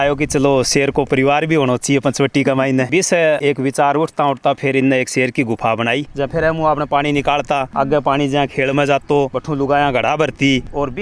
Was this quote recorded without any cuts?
no; 1 cut; at 6.1 s

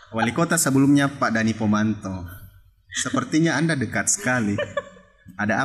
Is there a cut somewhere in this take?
no; 0 cuts

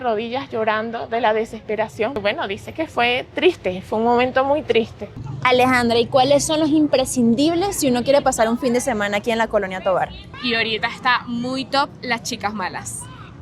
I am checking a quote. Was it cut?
yes; 3 cuts; at 2.2 s, 5.0 s, 10.3 s

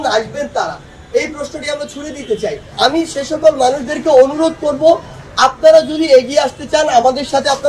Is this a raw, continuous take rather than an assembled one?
no; 1 cut; at 2.6 s

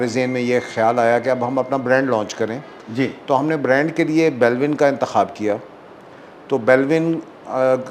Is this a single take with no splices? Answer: yes; 0 cuts

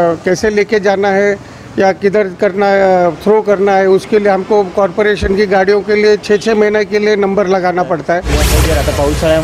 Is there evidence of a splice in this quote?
yes; 1 cut; at 8.5 s

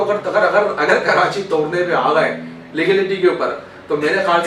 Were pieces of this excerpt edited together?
no; 0 cuts

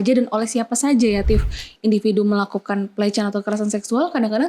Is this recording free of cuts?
no; 1 cut; at 1.2 s

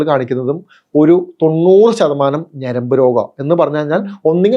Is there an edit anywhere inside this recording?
no; 0 cuts

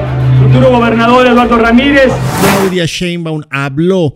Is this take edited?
yes; 1 cut; at 2.3 s

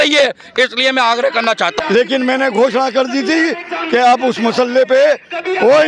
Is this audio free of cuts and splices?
no; 1 cut; at 1.8 s

